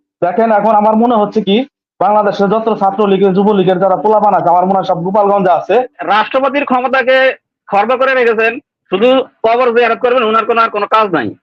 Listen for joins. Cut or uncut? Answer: cut